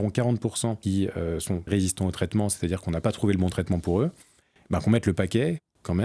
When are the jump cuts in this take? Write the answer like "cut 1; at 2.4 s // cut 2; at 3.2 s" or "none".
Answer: cut 1; at 0.8 s // cut 2; at 1.7 s